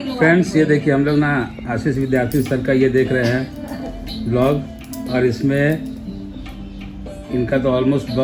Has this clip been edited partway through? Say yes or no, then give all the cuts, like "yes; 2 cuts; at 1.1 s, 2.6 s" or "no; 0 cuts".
no; 0 cuts